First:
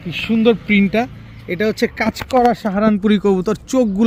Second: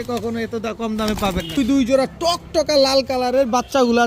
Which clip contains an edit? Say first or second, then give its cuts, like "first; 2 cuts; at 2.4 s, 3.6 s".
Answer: second; 1 cut; at 1.6 s